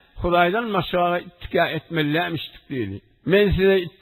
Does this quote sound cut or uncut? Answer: cut